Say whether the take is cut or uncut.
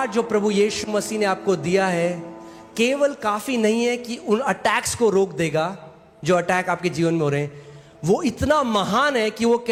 uncut